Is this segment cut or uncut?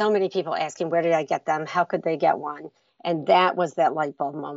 uncut